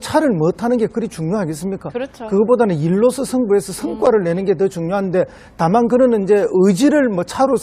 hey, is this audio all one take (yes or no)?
no